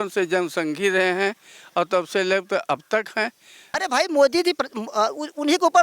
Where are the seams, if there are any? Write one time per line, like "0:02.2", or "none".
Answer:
0:03.7